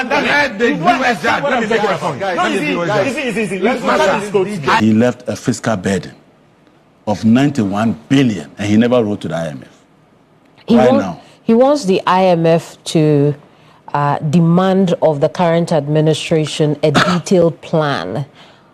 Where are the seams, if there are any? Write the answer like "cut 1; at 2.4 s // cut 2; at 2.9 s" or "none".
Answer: cut 1; at 4.8 s